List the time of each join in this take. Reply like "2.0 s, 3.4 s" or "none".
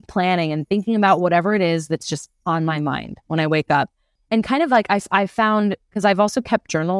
none